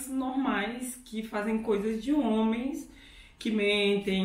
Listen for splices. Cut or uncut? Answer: uncut